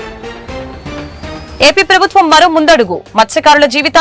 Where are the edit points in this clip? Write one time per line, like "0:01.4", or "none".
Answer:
none